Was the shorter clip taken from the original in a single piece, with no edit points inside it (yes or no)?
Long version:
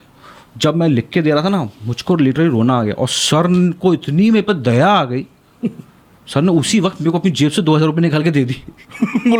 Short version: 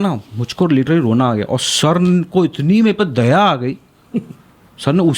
yes